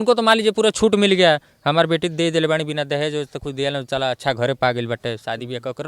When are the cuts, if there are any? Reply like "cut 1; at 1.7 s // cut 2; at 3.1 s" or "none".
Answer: none